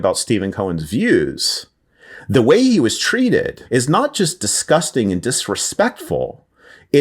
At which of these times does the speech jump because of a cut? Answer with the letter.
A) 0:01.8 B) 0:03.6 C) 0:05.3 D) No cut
B